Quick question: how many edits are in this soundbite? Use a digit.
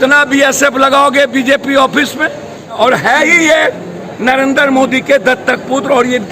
1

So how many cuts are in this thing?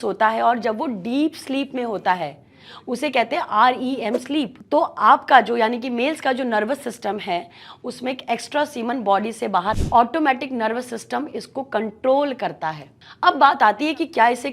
1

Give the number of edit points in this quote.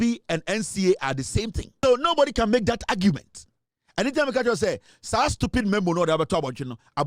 1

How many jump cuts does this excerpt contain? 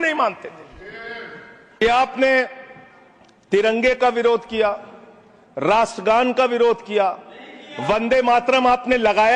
1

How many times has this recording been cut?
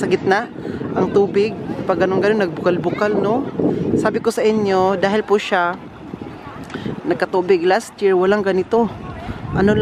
0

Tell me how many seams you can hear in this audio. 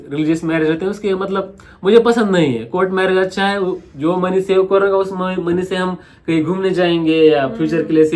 0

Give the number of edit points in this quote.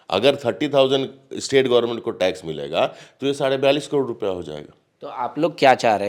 0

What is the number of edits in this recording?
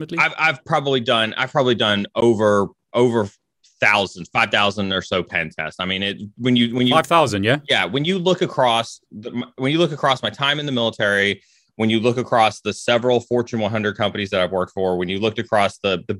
0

